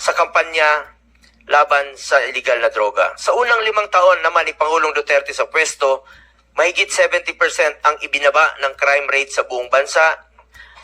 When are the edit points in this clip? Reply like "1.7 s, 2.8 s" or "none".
3.4 s